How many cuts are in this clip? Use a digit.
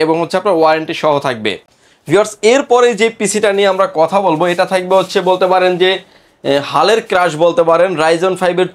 0